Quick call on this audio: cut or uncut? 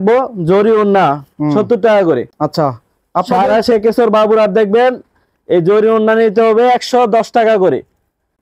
uncut